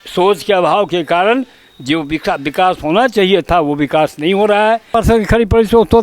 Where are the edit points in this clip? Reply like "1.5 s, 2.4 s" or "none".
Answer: 4.9 s